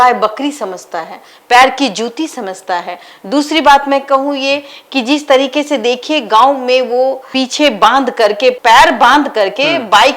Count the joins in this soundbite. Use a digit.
0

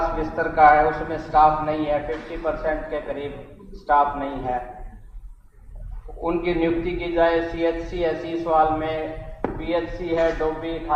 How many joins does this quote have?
0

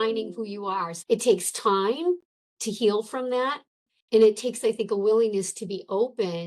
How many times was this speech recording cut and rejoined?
1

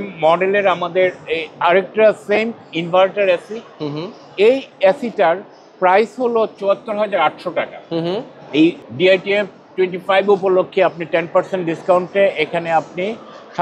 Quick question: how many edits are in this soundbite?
0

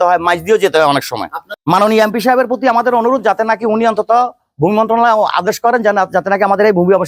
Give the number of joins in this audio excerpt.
0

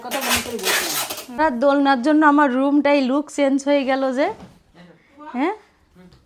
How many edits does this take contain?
1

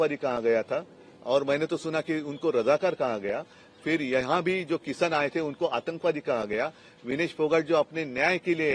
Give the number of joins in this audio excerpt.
0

